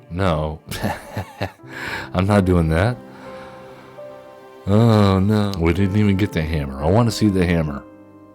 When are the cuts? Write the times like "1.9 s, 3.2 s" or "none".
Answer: 5.5 s